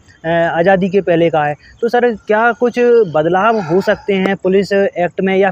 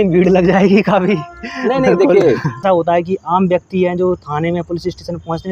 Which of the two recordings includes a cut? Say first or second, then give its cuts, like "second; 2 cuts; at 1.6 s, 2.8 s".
second; 1 cut; at 2.6 s